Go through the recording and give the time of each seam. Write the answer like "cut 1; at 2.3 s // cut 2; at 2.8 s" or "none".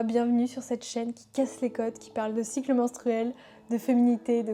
none